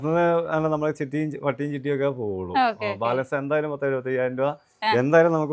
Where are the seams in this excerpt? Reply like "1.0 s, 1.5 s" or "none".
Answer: none